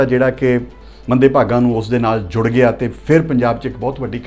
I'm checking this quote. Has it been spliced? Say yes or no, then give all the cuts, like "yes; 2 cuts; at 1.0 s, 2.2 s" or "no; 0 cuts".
no; 0 cuts